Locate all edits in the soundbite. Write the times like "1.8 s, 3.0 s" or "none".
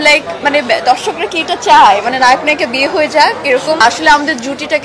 3.8 s